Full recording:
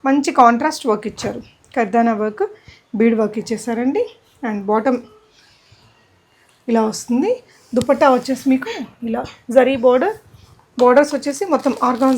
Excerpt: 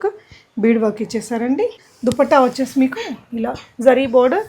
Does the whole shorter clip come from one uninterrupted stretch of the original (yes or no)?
no